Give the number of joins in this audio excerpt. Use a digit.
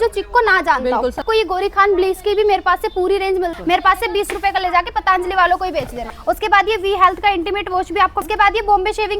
4